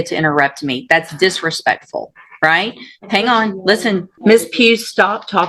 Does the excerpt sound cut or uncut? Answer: cut